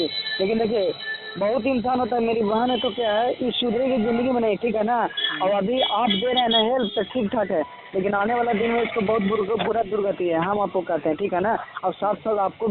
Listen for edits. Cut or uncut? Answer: uncut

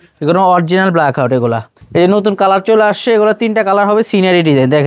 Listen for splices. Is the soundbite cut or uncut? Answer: cut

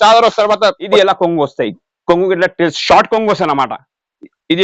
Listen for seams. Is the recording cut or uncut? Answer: cut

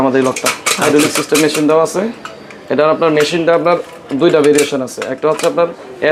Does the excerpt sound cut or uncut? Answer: uncut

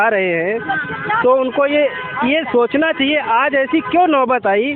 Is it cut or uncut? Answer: uncut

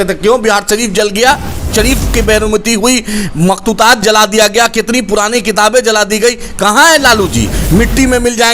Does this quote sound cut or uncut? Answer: cut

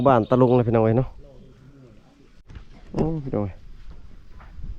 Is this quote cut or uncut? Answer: cut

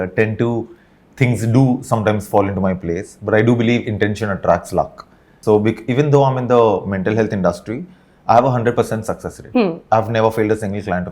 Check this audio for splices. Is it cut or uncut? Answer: cut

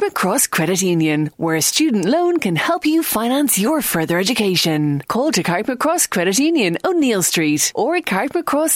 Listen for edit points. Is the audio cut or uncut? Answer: uncut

